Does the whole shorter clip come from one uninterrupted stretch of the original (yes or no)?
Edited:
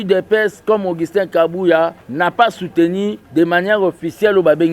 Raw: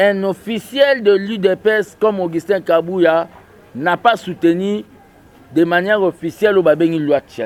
no